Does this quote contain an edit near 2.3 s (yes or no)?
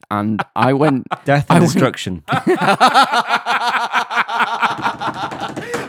yes